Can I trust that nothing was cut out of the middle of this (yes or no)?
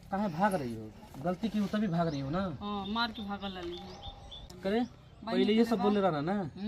no